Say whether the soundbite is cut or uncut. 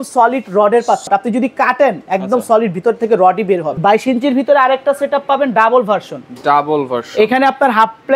cut